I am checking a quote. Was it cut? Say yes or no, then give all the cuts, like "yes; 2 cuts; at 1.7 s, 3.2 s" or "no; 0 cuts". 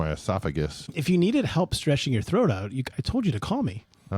yes; 1 cut; at 1.0 s